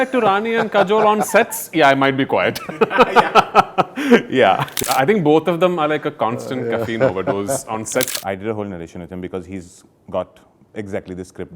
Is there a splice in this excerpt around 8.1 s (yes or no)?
yes